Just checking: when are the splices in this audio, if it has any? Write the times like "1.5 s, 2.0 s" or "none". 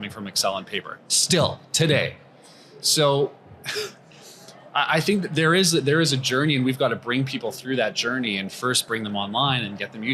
none